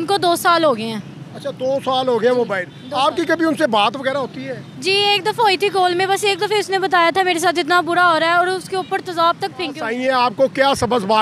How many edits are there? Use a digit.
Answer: 1